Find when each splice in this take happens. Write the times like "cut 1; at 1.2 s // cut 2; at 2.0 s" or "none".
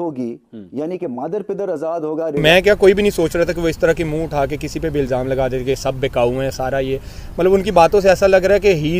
cut 1; at 2.4 s